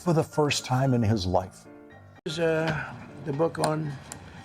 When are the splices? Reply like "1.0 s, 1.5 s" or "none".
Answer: 2.3 s